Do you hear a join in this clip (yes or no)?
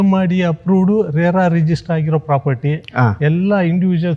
no